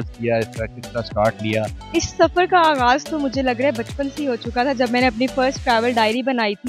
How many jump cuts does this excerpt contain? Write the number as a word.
one